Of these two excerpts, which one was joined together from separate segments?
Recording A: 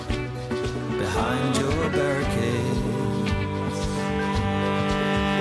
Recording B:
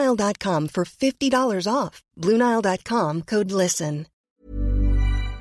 B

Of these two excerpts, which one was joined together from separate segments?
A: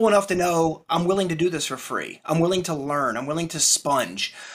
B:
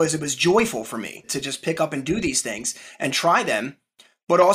B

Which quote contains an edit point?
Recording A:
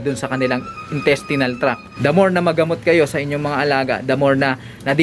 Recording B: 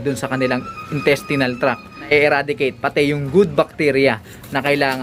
A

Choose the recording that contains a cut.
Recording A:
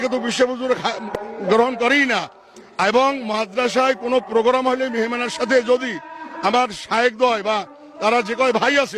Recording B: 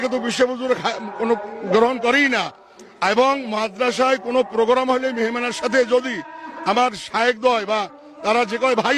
A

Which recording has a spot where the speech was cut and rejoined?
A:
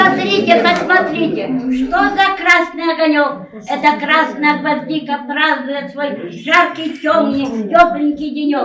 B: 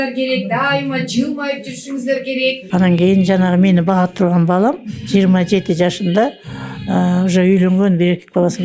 B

